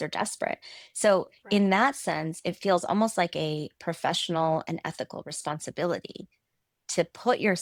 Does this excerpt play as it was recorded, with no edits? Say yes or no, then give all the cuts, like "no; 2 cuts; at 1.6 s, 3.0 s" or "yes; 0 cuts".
yes; 0 cuts